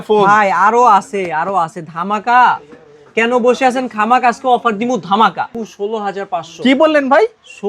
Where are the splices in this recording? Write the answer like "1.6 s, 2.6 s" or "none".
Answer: 5.5 s